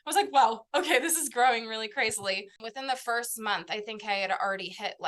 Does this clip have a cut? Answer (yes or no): yes